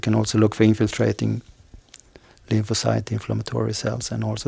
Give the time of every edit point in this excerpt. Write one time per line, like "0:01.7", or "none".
none